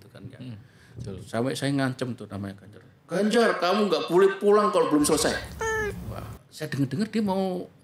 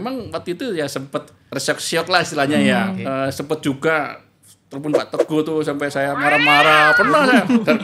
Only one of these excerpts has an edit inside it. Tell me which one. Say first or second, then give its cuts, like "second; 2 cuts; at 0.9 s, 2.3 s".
second; 2 cuts; at 1.4 s, 3.0 s